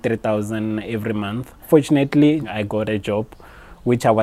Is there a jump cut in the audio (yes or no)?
yes